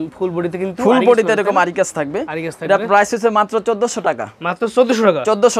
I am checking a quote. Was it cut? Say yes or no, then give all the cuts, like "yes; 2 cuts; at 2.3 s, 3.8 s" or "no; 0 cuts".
no; 0 cuts